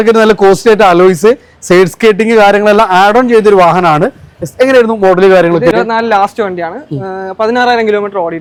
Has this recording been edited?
no; 0 cuts

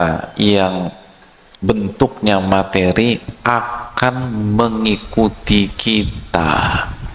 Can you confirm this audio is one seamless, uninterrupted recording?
yes; 0 cuts

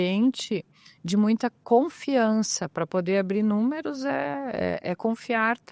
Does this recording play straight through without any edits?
yes; 0 cuts

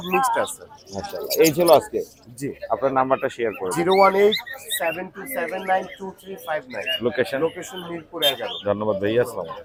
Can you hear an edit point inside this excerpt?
no; 0 cuts

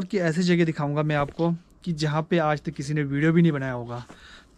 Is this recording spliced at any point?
no; 0 cuts

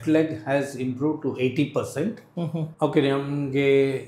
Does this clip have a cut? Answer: yes; 1 cut; at 2.7 s

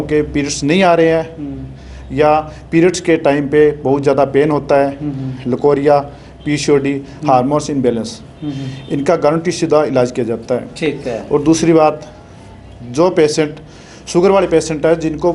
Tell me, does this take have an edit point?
no; 0 cuts

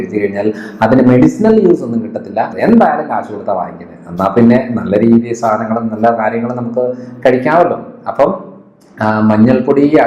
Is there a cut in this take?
yes; 1 cut; at 2.5 s

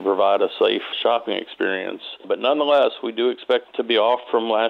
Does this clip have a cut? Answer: yes; 3 cuts; at 0.9 s, 2.2 s, 3.7 s

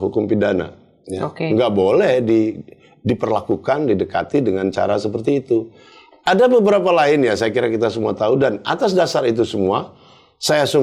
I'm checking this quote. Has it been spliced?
no; 0 cuts

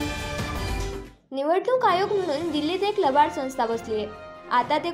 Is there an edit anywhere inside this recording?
yes; 1 cut; at 1.1 s

